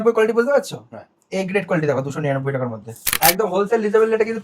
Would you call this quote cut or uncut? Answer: cut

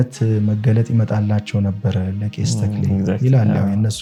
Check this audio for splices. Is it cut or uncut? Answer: uncut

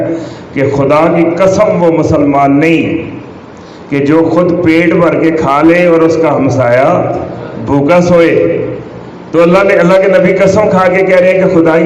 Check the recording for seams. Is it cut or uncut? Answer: uncut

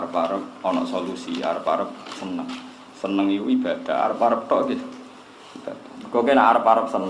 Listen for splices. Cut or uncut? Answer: uncut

